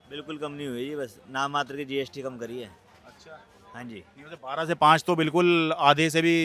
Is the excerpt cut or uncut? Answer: uncut